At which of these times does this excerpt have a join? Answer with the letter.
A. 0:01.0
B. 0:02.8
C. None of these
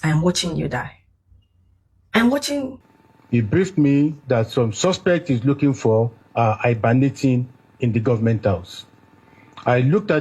B